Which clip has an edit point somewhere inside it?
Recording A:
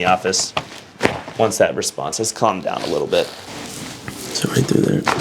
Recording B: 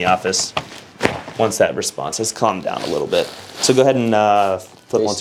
A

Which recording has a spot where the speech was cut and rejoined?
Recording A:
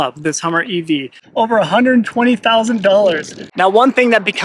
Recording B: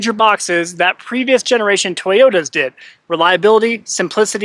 A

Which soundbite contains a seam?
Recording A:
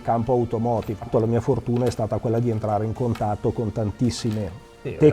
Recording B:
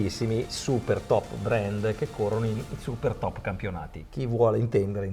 A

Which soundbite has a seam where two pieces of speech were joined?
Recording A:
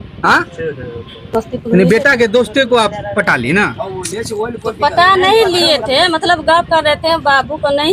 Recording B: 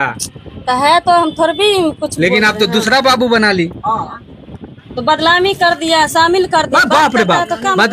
A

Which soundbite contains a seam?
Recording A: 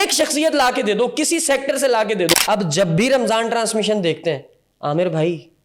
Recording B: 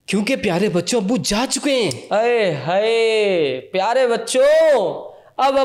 A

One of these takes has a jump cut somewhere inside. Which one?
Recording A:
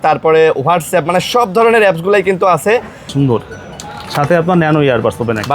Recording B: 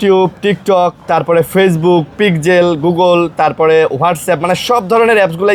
A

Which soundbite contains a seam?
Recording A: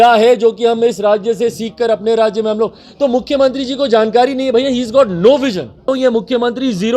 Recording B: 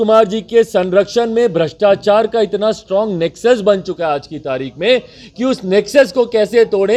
A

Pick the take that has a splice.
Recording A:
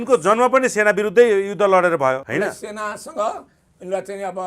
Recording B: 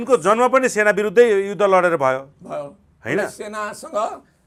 A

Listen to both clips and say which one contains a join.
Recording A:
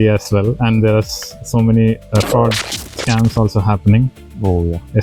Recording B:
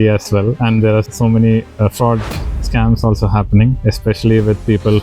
B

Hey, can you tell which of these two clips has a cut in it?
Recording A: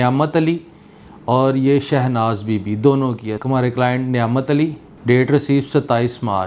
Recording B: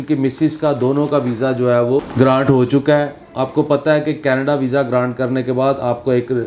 B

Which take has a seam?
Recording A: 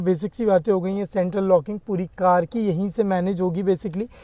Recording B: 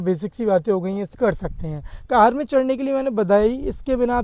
B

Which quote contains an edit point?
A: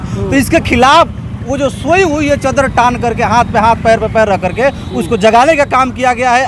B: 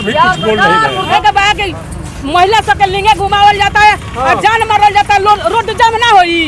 B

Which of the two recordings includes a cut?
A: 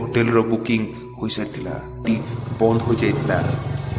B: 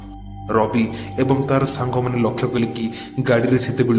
A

